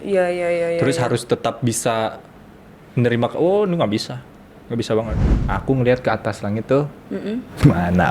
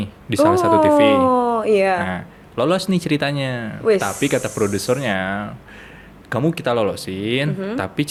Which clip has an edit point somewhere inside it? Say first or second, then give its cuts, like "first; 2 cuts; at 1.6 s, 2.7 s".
first; 1 cut; at 5.3 s